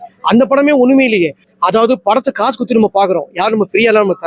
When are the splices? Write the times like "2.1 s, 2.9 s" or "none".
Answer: 1.4 s